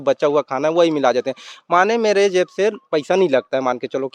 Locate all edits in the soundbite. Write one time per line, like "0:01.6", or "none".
none